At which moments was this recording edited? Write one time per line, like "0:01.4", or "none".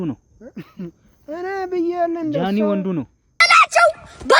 0:03.5